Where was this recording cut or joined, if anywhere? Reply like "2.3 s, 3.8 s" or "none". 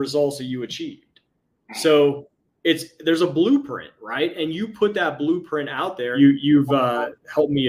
6.1 s